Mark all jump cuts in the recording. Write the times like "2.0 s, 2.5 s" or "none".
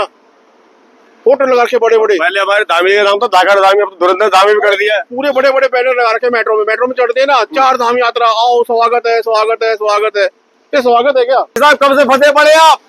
11.5 s